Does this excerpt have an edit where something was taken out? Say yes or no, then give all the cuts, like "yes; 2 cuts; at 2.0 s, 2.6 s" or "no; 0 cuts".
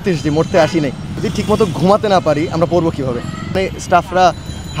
yes; 1 cut; at 3.6 s